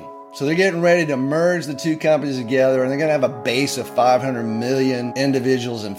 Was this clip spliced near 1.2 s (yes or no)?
no